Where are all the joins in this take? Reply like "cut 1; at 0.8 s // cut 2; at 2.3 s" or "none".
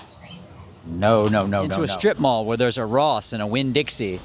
cut 1; at 1.3 s